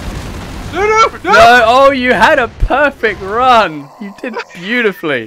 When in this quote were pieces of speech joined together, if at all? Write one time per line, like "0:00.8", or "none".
none